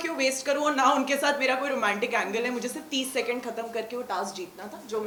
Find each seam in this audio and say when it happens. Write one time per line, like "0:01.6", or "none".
none